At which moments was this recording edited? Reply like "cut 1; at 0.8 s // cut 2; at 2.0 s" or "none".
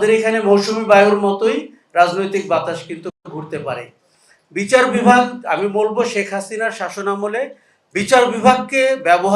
none